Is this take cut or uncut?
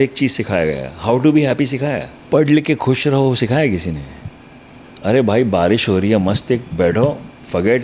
cut